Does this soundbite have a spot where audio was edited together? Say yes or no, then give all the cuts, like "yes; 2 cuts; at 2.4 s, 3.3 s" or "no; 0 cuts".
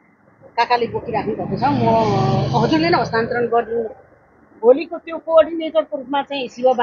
no; 0 cuts